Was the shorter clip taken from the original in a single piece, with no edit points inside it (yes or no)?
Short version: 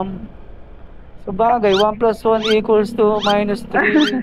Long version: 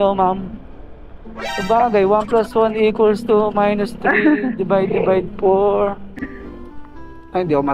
yes